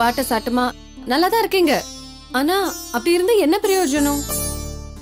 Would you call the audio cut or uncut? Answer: uncut